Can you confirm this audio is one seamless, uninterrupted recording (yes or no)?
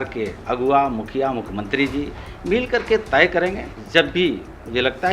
no